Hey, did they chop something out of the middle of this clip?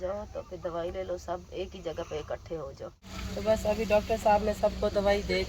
yes; 1 cut; at 3.1 s

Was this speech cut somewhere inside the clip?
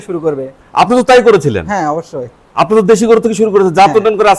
no; 0 cuts

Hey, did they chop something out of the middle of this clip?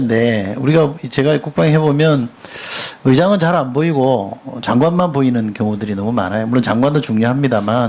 yes; 1 cut; at 2.4 s

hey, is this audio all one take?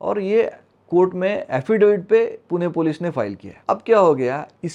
no; 1 cut; at 3.5 s

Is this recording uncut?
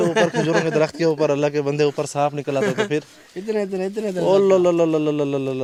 yes; 0 cuts

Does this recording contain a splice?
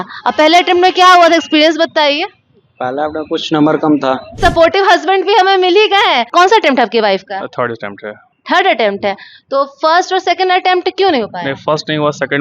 yes; 2 cuts; at 4.4 s, 6.3 s

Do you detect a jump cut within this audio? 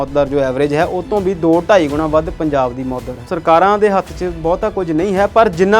yes; 1 cut; at 3.2 s

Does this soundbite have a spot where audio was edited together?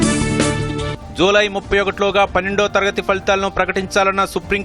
yes; 1 cut; at 1.0 s

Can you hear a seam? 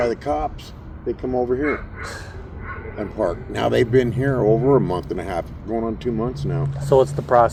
no; 0 cuts

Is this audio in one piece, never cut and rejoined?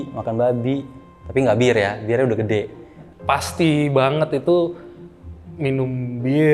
yes; 0 cuts

